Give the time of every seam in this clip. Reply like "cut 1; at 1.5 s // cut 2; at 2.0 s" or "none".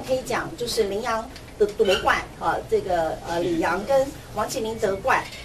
none